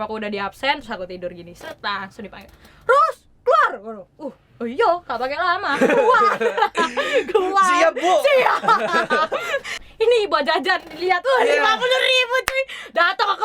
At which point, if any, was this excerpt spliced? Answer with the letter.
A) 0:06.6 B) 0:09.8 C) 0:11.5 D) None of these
B